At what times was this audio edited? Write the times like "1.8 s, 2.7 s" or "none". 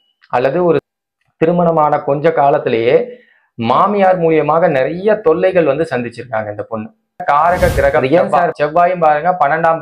0.9 s, 7.2 s